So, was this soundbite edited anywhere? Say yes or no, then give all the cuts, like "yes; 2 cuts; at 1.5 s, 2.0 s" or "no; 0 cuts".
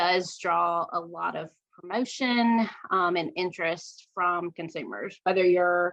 no; 0 cuts